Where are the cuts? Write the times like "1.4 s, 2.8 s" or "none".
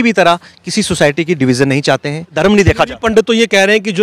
2.4 s